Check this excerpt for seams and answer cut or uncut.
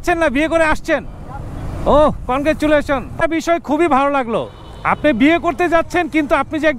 cut